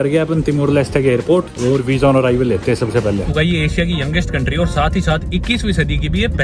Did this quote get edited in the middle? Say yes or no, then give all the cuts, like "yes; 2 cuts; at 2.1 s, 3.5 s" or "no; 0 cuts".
yes; 2 cuts; at 1.5 s, 3.3 s